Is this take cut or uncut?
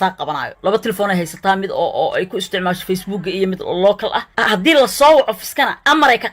cut